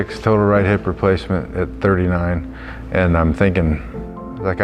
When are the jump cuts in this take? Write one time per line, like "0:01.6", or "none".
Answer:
none